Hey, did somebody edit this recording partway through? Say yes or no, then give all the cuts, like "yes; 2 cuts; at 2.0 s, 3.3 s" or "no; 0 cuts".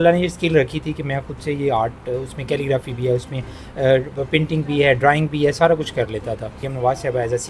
yes; 1 cut; at 6.6 s